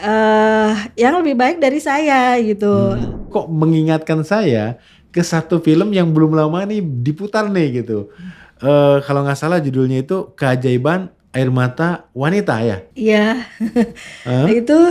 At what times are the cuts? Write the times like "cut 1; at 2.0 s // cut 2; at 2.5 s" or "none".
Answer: cut 1; at 3.2 s // cut 2; at 12.9 s